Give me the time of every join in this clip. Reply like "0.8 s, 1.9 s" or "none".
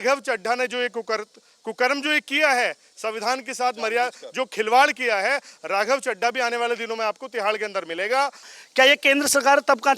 8.5 s